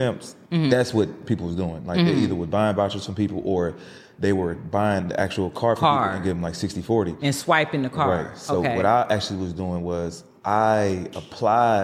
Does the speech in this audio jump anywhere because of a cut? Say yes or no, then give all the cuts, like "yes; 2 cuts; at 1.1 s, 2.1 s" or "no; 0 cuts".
no; 0 cuts